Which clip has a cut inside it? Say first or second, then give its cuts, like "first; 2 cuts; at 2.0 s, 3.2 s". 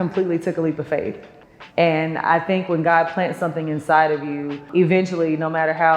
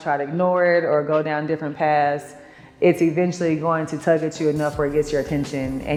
first; 1 cut; at 4.6 s